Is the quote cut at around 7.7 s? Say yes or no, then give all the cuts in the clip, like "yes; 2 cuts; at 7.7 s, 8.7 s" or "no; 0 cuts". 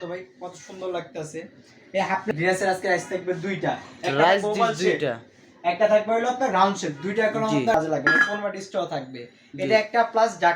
yes; 2 cuts; at 2.3 s, 7.7 s